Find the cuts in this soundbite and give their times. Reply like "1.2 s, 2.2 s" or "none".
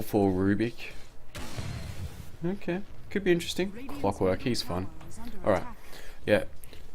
2.4 s